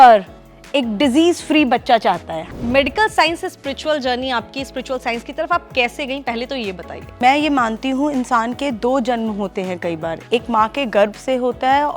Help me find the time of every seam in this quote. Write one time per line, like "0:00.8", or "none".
0:02.3
0:07.1